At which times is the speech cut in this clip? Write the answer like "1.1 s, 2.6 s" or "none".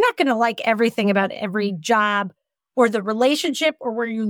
none